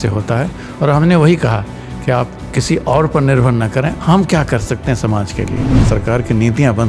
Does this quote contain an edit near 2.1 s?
no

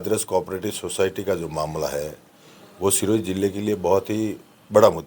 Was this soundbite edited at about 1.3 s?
no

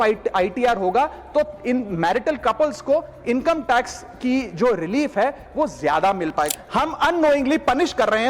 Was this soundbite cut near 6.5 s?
yes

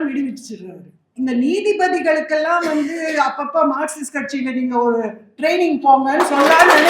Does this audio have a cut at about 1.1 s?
yes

